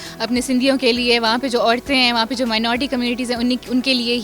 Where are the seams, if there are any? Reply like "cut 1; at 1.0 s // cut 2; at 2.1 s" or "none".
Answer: none